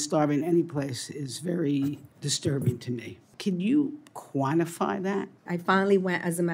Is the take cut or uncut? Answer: cut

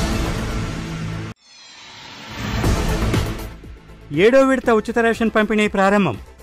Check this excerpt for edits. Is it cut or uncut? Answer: cut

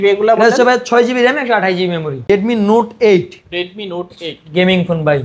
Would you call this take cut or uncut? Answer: cut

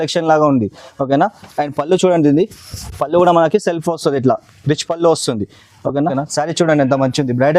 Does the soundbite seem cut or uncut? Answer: cut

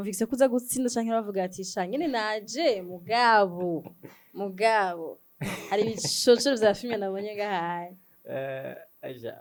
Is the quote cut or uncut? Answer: uncut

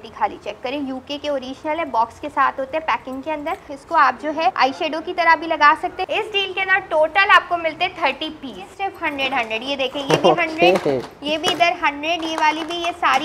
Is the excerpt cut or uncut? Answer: cut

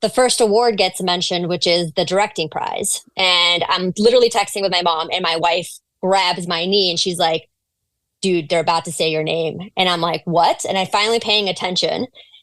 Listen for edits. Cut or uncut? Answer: uncut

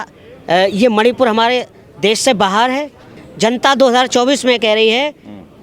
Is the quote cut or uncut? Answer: cut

